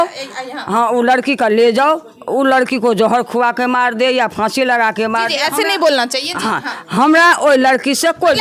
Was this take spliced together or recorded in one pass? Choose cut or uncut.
uncut